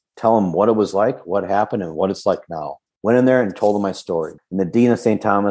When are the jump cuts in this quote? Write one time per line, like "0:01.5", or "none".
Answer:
0:02.8
0:04.4